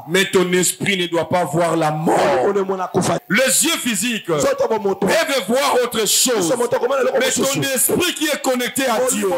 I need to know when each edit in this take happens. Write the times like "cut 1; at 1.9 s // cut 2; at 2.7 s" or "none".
cut 1; at 3.2 s